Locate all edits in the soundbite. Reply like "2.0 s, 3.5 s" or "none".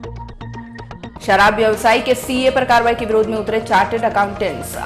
1.1 s